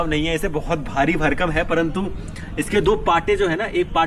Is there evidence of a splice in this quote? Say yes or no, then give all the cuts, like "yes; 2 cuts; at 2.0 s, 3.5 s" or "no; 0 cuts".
no; 0 cuts